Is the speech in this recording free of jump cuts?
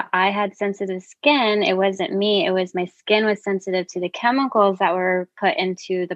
yes; 0 cuts

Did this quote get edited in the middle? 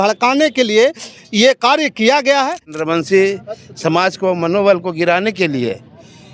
yes; 1 cut; at 2.7 s

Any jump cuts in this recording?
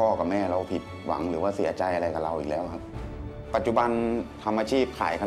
yes; 2 cuts; at 2.9 s, 4.3 s

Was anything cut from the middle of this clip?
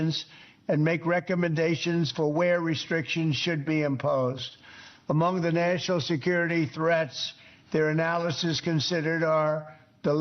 no; 0 cuts

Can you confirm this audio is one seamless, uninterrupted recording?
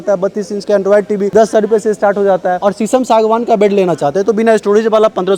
no; 1 cut; at 2.6 s

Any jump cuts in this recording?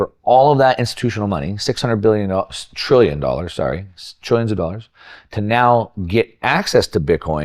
no; 0 cuts

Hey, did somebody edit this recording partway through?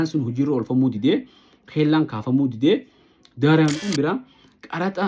yes; 1 cut; at 3.7 s

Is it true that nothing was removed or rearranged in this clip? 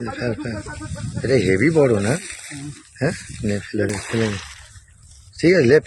yes; 0 cuts

